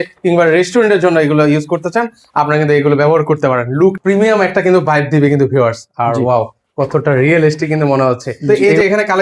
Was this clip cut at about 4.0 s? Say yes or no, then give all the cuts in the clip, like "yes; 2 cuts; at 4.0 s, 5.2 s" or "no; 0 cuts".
yes; 2 cuts; at 4.0 s, 8.5 s